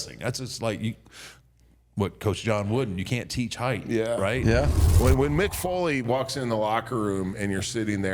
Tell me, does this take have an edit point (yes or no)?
yes